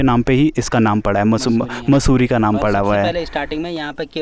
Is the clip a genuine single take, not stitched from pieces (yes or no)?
yes